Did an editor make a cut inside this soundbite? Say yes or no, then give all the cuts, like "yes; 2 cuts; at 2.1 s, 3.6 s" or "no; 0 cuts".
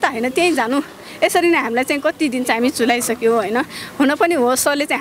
no; 0 cuts